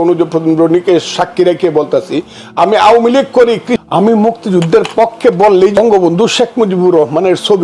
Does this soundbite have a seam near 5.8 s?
yes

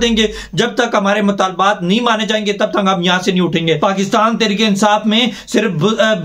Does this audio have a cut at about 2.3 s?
no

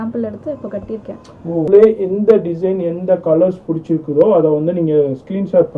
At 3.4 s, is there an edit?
no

